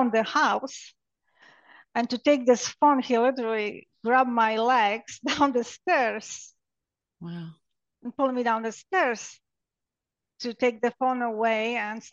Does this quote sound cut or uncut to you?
uncut